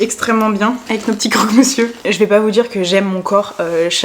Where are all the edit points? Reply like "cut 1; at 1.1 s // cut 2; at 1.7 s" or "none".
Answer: cut 1; at 0.8 s // cut 2; at 2.0 s